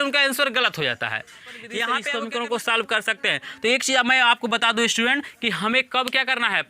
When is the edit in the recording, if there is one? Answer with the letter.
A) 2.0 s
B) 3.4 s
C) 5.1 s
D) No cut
A